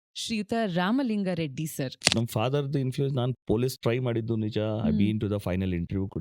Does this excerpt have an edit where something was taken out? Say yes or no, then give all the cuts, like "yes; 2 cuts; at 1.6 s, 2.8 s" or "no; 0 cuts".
yes; 1 cut; at 2.0 s